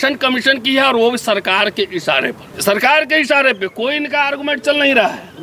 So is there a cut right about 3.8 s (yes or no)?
no